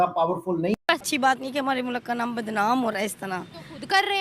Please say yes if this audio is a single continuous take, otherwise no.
no